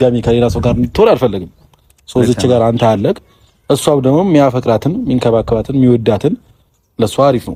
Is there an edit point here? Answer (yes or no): no